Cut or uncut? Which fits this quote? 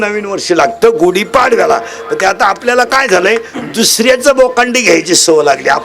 uncut